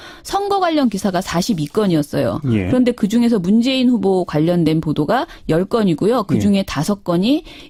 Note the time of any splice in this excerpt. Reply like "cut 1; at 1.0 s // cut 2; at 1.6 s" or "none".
none